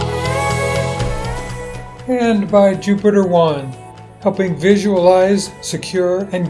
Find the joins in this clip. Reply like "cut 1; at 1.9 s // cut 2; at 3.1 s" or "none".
cut 1; at 1.9 s